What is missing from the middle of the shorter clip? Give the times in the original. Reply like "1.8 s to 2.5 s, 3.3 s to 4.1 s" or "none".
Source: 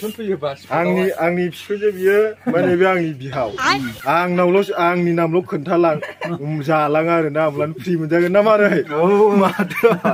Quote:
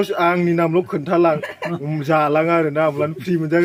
none